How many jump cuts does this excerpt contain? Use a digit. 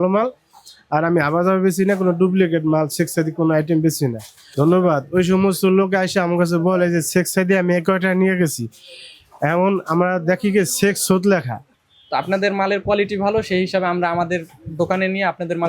2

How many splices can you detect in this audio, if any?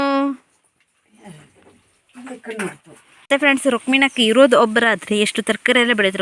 1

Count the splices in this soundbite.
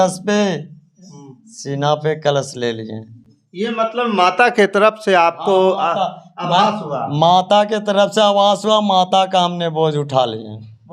0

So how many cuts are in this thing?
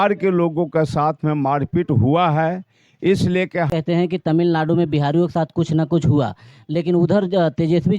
1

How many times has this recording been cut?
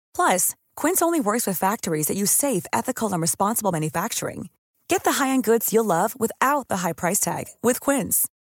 0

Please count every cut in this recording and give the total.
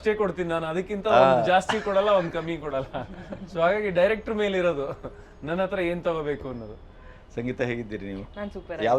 0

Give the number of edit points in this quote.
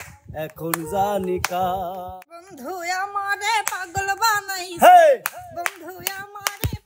1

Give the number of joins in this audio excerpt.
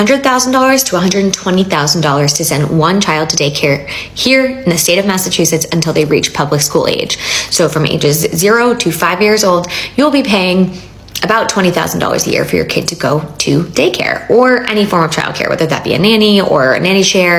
0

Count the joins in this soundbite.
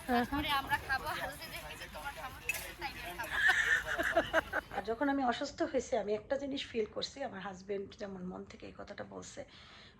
1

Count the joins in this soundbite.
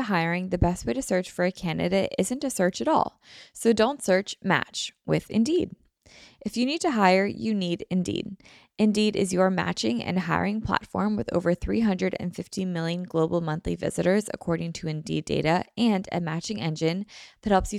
0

